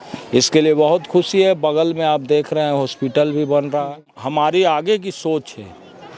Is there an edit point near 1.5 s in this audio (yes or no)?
no